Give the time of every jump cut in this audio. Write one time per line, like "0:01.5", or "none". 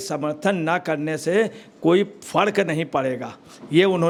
none